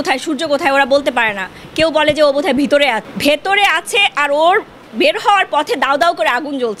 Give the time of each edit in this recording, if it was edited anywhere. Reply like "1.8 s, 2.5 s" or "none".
3.1 s